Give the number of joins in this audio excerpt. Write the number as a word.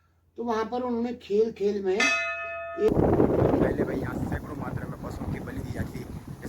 one